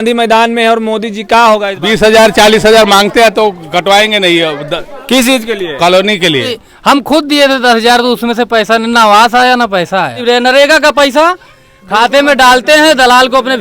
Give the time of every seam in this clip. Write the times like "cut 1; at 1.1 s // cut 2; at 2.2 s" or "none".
cut 1; at 1.7 s // cut 2; at 6.6 s // cut 3; at 10.2 s

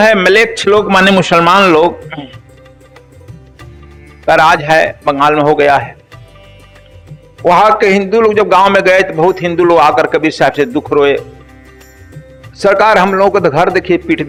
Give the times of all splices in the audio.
none

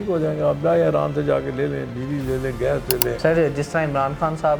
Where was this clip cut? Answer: cut 1; at 3.2 s

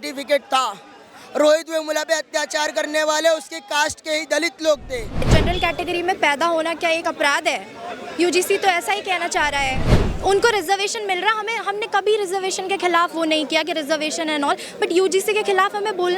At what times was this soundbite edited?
cut 1; at 5.3 s // cut 2; at 10.0 s

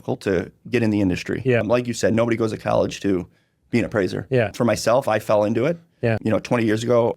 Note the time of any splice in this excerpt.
cut 1; at 1.6 s // cut 2; at 4.5 s // cut 3; at 6.2 s

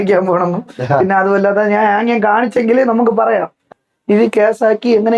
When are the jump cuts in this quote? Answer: cut 1; at 3.7 s

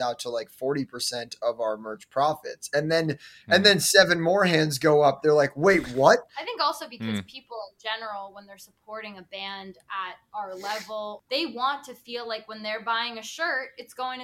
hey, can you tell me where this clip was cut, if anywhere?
cut 1; at 6.2 s // cut 2; at 11.2 s

